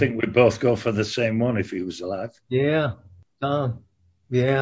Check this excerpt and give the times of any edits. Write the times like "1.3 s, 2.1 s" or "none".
3.2 s